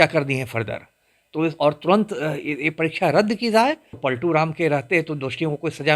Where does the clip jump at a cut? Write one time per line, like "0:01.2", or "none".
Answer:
0:04.0